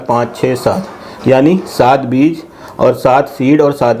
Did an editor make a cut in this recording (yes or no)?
no